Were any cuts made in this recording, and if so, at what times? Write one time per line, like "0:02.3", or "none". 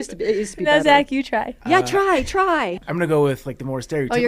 0:01.5
0:02.6